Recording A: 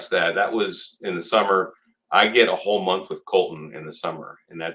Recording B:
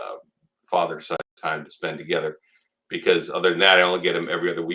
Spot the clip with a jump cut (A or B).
B